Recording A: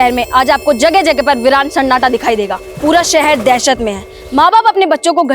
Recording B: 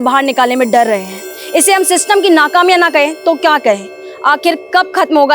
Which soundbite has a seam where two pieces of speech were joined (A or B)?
A